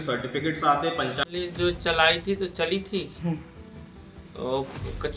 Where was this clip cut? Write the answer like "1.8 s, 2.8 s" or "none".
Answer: 1.3 s